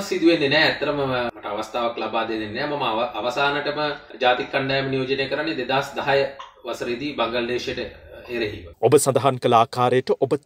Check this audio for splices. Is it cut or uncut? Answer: uncut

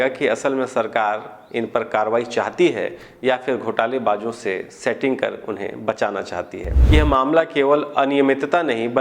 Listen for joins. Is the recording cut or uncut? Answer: cut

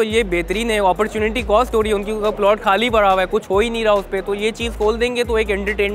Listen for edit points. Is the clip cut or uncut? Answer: uncut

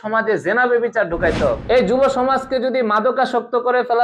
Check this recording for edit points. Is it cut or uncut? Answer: cut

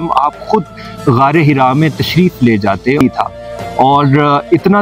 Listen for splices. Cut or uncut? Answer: cut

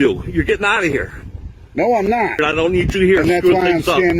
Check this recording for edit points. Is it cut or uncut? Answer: cut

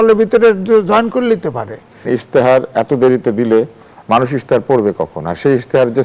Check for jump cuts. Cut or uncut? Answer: cut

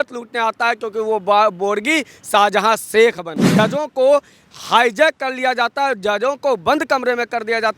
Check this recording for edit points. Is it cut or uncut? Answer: cut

